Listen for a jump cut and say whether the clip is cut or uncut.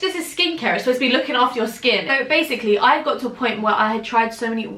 cut